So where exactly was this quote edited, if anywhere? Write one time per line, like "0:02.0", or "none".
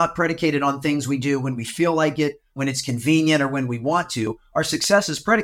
0:02.6